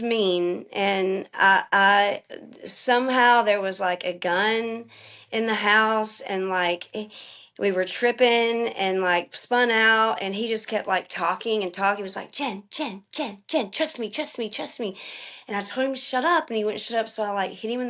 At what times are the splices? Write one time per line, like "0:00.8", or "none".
none